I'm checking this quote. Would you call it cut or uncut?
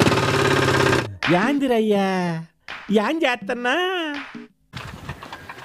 cut